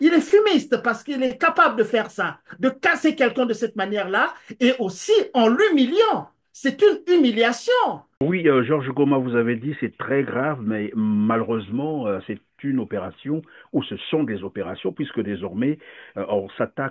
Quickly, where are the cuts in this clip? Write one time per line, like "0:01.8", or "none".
0:08.2